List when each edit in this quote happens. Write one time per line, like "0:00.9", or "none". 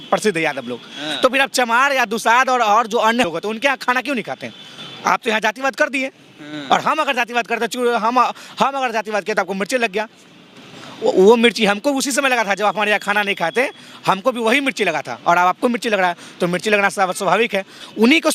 none